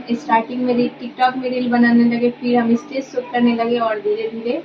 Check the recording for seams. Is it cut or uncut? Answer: uncut